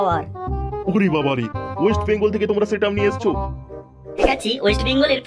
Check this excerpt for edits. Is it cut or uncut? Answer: cut